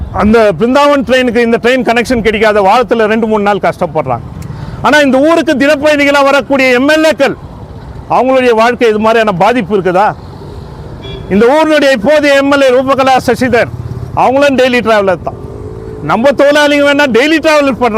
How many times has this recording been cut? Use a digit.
0